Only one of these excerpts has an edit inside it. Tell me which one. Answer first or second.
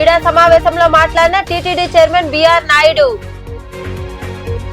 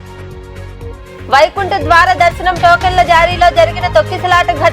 second